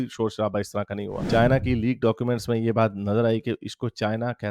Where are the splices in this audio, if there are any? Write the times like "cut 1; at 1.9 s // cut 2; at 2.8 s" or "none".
cut 1; at 1.3 s